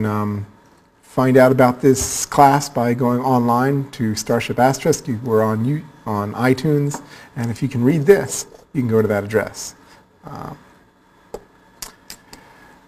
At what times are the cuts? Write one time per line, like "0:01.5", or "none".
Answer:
0:10.5